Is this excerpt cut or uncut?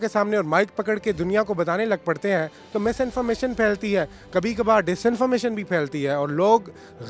uncut